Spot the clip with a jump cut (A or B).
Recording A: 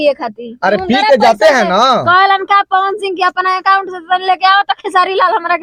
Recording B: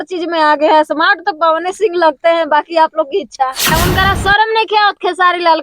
B